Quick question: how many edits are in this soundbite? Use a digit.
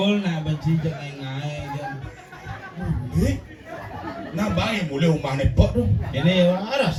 0